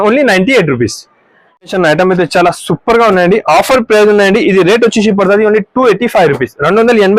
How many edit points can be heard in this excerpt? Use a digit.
1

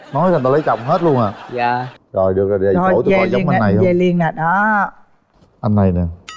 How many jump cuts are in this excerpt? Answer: 1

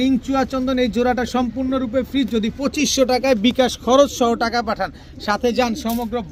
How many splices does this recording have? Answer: 0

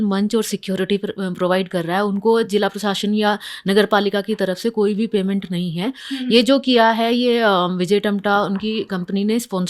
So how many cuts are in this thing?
0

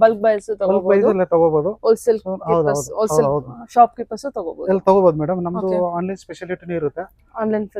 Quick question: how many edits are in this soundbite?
0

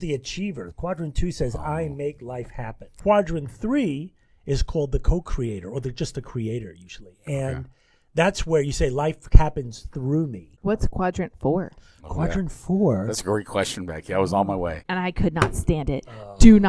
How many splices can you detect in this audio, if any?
3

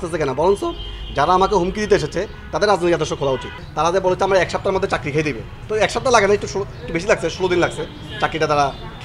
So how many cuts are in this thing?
1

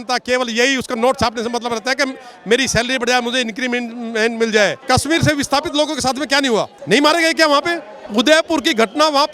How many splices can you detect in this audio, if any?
3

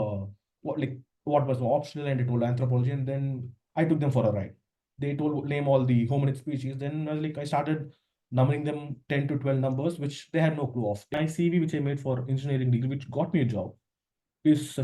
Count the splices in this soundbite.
1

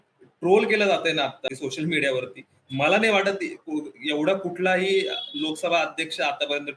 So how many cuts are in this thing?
0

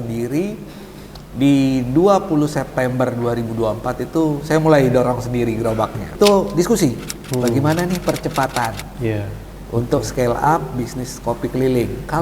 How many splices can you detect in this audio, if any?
1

